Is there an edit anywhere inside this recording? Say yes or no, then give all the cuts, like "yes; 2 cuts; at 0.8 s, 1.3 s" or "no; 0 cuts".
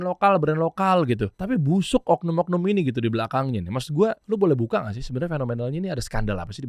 yes; 2 cuts; at 1.3 s, 4.2 s